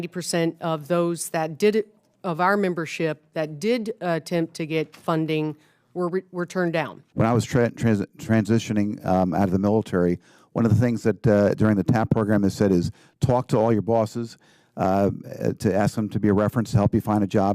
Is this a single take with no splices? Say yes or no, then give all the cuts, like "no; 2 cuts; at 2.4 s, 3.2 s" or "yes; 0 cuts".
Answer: no; 1 cut; at 7.0 s